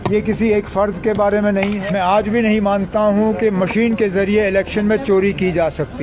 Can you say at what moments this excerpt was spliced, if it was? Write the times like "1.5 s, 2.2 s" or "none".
1.8 s